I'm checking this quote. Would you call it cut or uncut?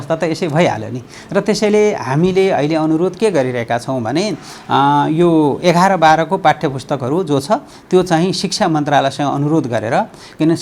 uncut